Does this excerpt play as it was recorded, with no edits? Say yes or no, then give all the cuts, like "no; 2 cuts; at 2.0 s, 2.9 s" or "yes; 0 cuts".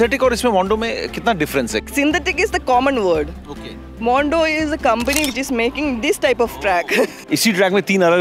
no; 2 cuts; at 1.8 s, 7.2 s